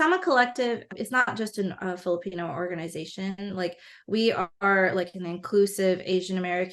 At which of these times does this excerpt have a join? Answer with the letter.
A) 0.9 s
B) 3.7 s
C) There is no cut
A